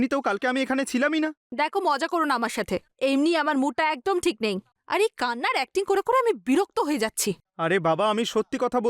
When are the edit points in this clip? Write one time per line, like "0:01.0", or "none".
0:01.4